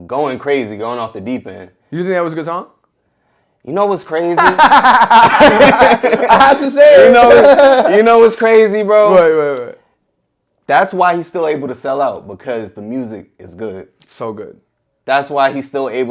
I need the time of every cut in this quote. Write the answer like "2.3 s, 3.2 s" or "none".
none